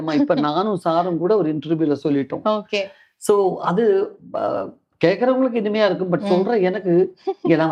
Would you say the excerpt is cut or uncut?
uncut